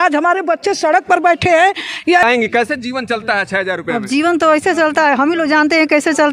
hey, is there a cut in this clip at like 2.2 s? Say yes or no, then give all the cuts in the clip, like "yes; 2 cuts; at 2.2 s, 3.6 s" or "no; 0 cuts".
yes; 1 cut; at 2.2 s